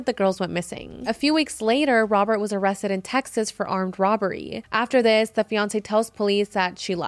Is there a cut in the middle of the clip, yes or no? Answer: yes